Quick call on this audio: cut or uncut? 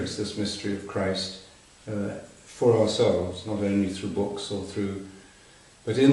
uncut